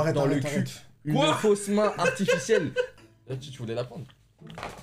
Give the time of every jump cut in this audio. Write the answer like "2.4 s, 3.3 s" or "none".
2.9 s